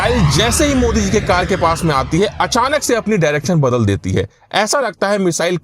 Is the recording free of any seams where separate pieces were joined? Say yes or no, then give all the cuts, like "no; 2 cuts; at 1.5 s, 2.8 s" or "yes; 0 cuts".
yes; 0 cuts